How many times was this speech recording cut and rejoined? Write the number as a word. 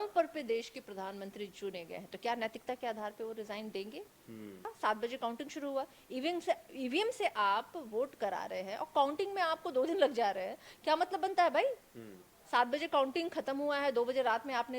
one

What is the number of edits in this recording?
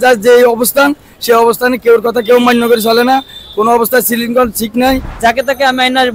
one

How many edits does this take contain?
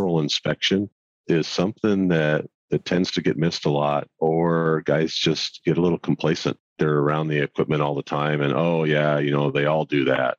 one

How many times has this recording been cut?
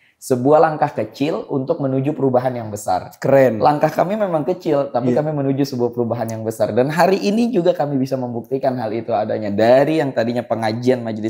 zero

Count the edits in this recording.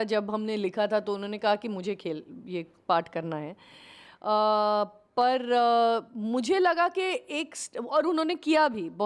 zero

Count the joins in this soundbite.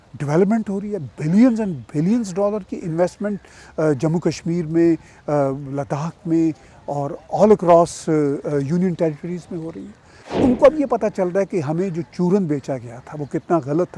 one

